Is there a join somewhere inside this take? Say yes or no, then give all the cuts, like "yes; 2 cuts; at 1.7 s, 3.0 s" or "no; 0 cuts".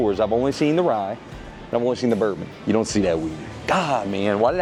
no; 0 cuts